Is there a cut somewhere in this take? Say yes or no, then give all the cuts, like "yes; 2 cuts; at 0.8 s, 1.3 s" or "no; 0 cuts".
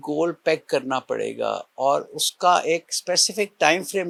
no; 0 cuts